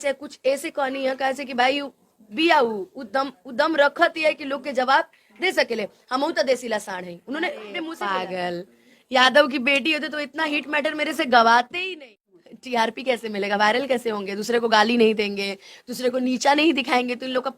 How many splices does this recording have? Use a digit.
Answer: 2